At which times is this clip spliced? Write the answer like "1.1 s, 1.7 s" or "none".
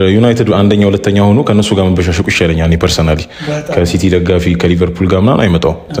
none